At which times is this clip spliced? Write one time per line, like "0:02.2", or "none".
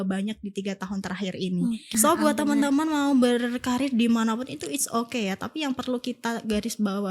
0:01.9